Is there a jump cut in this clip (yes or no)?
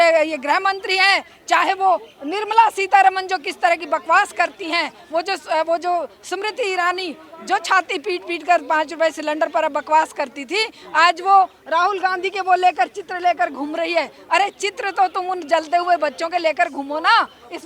no